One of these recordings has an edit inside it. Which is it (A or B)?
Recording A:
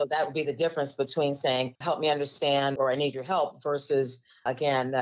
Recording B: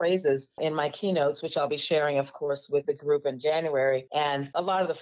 A